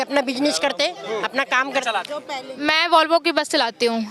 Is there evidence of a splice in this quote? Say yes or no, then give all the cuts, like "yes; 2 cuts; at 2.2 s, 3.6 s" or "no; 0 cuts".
yes; 1 cut; at 1.9 s